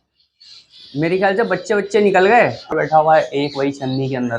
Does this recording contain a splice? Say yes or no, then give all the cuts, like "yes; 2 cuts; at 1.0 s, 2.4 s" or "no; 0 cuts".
yes; 1 cut; at 2.7 s